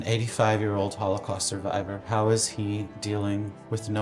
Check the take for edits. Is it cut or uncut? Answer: cut